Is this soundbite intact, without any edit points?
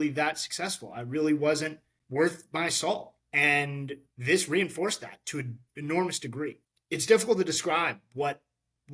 yes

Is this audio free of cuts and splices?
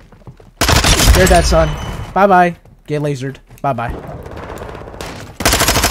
yes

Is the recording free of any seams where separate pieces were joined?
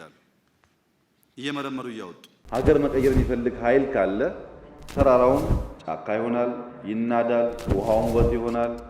no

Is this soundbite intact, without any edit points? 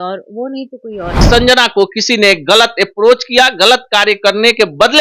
no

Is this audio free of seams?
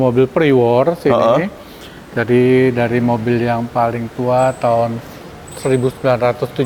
yes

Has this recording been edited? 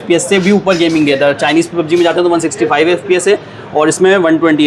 no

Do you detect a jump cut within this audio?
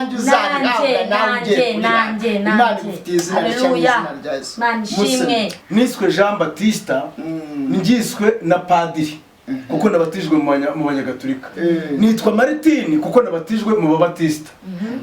yes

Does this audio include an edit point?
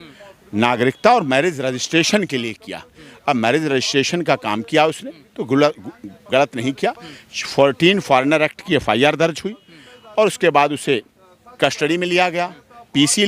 no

